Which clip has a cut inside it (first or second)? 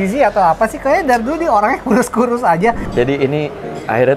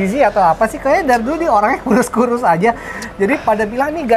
first